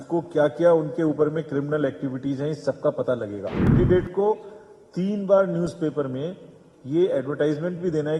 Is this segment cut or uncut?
cut